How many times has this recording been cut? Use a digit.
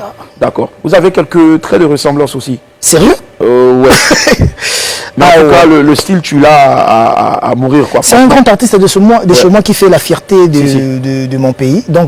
0